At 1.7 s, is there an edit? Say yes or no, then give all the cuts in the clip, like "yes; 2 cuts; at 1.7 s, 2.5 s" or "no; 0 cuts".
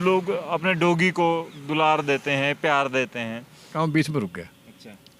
no; 1 cut; at 3.7 s